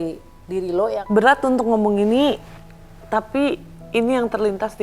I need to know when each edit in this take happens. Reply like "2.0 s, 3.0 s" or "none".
1.0 s